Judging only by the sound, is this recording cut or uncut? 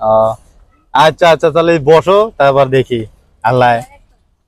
uncut